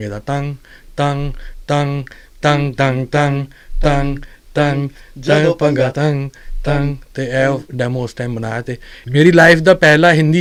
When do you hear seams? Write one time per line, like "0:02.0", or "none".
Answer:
none